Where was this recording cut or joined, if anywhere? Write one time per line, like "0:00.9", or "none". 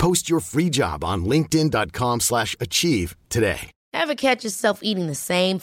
0:03.7